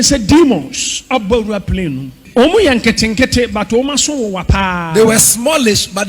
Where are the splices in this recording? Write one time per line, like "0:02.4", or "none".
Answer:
0:02.2